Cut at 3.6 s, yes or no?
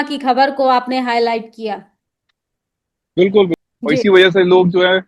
yes